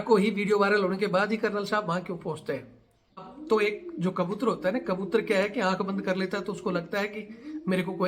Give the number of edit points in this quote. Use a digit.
1